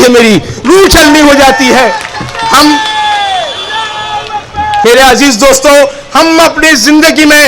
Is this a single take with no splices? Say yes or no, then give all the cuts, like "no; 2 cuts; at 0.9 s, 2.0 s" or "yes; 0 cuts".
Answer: no; 1 cut; at 4.8 s